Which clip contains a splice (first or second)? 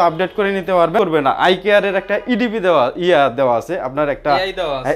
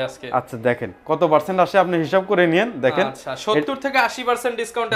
first